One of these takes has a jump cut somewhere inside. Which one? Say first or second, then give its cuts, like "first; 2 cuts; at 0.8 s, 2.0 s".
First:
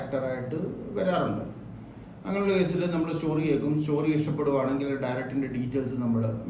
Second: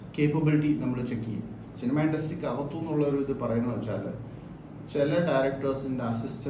second; 1 cut; at 1.6 s